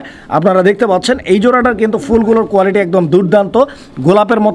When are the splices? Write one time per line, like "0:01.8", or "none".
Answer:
none

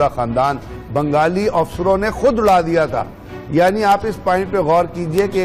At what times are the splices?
none

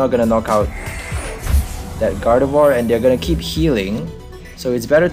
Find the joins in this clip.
none

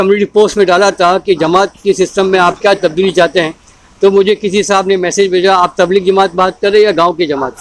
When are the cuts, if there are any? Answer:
none

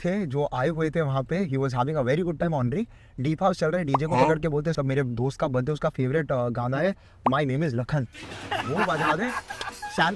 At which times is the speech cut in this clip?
0:04.8

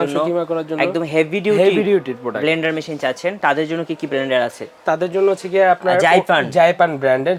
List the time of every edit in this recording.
none

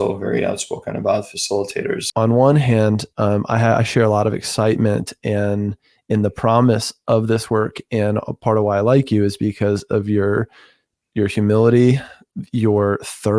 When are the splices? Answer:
0:02.0

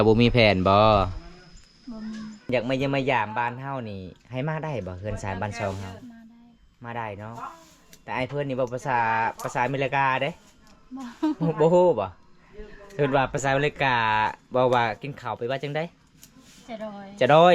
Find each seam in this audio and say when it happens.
0:02.5
0:13.4

